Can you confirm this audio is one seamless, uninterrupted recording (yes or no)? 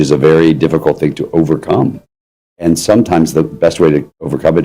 yes